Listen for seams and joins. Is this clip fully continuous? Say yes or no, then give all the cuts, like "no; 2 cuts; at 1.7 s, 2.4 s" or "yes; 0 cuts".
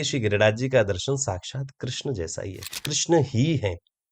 no; 1 cut; at 2.7 s